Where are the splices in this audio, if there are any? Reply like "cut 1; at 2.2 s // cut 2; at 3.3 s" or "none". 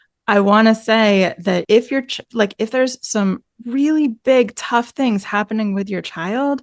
cut 1; at 1.6 s